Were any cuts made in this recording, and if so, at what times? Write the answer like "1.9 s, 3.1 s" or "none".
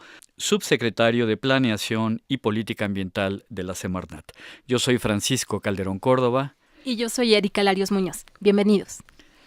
none